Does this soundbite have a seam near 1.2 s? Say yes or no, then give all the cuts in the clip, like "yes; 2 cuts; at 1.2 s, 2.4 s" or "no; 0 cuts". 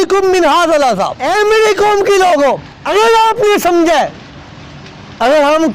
yes; 2 cuts; at 1.2 s, 2.7 s